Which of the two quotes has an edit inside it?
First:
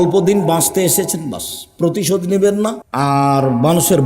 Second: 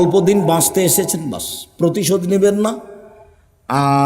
first; 1 cut; at 2.8 s

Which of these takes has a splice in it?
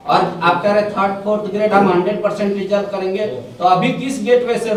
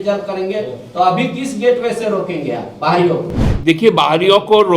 second; 1 cut; at 3.4 s

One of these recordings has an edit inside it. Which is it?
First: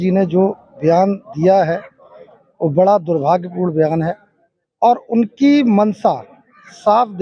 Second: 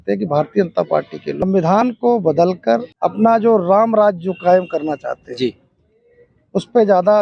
second; 2 cuts; at 1.4 s, 2.9 s

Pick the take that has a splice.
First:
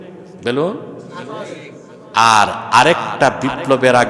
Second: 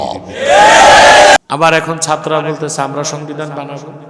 second; 1 cut; at 1.4 s

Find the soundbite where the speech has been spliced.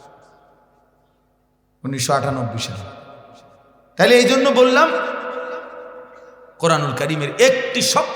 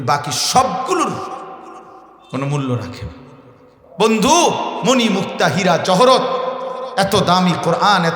second; 1 cut; at 3.8 s

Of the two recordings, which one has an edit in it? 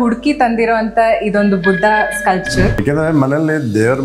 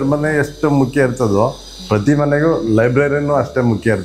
first; 1 cut; at 2.8 s

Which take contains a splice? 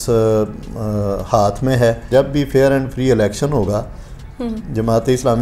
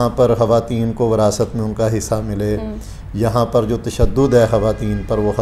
first; 1 cut; at 2.1 s

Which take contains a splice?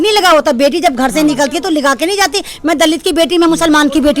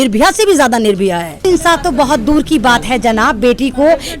second; 1 cut; at 1.4 s

